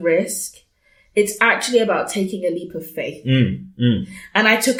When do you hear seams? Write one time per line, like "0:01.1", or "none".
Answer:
none